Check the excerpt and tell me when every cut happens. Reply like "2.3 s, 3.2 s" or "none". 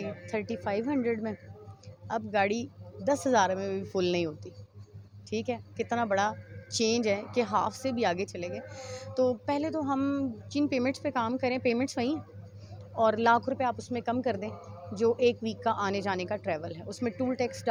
none